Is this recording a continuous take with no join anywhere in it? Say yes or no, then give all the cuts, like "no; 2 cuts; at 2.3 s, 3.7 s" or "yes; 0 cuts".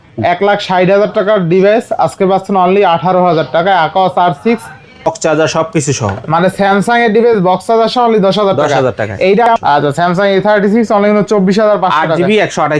no; 2 cuts; at 5.1 s, 9.5 s